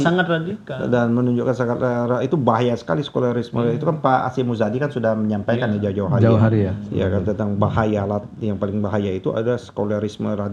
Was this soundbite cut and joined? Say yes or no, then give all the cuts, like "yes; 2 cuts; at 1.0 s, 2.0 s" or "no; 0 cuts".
no; 0 cuts